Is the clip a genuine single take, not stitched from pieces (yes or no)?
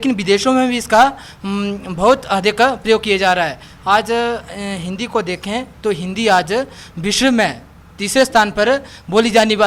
yes